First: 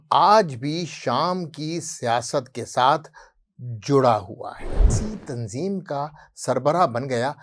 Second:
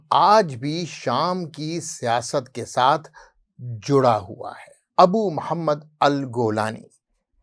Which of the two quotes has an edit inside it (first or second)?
first